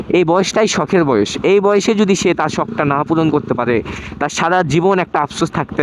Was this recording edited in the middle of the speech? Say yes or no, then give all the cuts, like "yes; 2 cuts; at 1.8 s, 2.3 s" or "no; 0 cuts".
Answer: no; 0 cuts